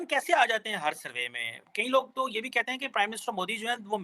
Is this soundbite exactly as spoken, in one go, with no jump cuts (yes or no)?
yes